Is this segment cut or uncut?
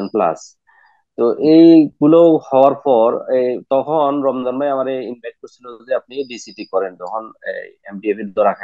uncut